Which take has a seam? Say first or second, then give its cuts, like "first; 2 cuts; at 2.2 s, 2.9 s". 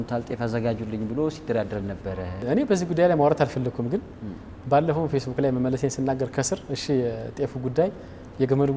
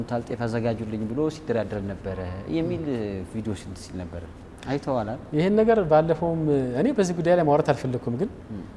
first; 1 cut; at 2.4 s